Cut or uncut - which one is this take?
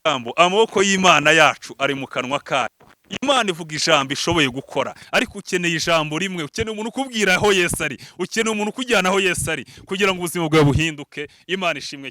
cut